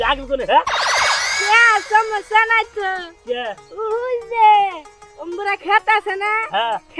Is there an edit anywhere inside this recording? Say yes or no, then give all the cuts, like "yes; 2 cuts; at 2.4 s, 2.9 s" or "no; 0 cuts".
no; 0 cuts